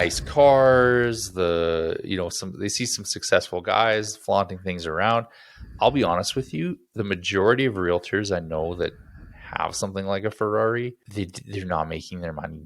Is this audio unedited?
no; 1 cut; at 11.0 s

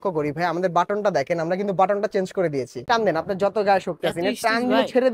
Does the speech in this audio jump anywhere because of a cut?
yes; 1 cut; at 2.8 s

